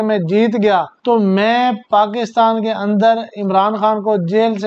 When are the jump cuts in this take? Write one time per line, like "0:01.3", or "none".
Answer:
0:00.9